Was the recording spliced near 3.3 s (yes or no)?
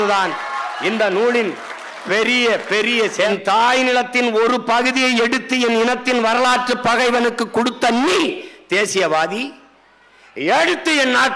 yes